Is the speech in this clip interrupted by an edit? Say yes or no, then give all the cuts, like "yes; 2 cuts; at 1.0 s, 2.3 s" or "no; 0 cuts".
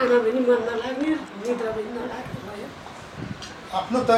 yes; 1 cut; at 3.1 s